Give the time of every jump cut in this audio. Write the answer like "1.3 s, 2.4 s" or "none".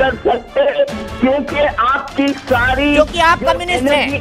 none